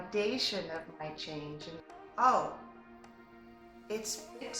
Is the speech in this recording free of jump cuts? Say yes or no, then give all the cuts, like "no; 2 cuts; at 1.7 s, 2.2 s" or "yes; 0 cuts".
no; 1 cut; at 1.8 s